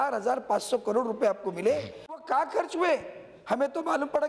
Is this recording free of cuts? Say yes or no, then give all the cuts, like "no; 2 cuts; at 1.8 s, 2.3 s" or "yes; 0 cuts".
no; 1 cut; at 2.2 s